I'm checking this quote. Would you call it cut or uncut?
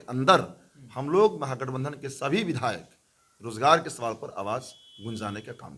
uncut